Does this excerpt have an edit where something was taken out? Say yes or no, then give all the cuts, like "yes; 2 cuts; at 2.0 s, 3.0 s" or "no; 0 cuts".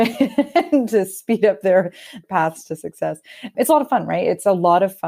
no; 0 cuts